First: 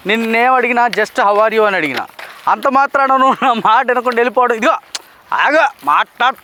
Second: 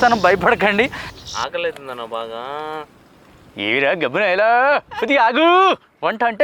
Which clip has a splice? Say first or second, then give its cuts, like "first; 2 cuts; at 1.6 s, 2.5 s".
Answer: second; 1 cut; at 1.0 s